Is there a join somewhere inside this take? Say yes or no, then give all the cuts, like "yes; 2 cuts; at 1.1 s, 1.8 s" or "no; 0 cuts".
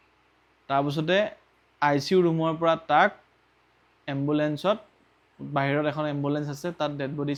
no; 0 cuts